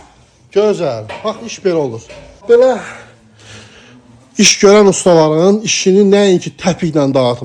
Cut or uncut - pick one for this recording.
cut